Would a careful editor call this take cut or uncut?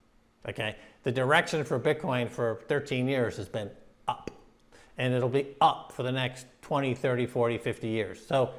uncut